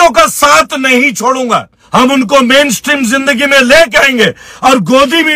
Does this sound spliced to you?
yes; 1 cut; at 1.7 s

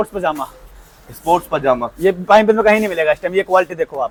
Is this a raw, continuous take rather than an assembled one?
yes; 0 cuts

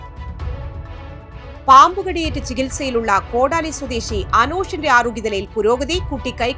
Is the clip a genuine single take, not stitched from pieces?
no; 1 cut; at 1.6 s

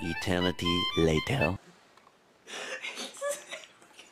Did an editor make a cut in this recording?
yes; 1 cut; at 1.6 s

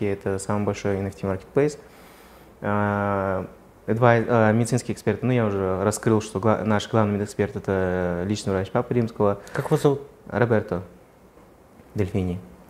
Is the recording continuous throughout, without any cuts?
yes; 0 cuts

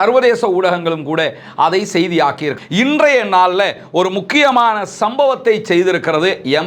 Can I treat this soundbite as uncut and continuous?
no; 1 cut; at 2.5 s

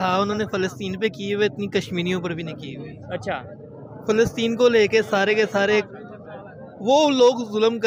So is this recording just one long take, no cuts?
yes; 0 cuts

